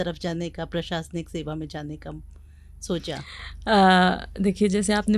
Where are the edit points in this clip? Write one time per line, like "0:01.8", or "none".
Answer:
none